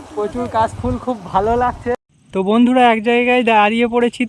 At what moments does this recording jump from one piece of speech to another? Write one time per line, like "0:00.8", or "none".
0:02.1